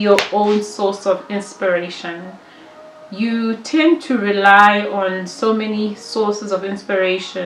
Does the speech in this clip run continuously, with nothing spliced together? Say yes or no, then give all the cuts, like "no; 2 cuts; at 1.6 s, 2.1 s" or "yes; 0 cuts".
yes; 0 cuts